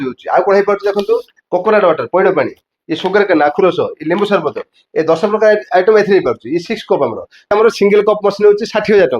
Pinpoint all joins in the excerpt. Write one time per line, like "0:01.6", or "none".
0:07.5